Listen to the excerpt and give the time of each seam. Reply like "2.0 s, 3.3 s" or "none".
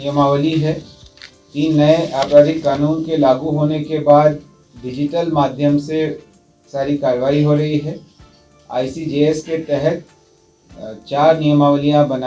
none